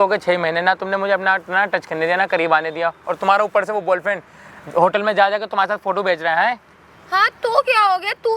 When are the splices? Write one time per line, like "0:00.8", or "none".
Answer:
none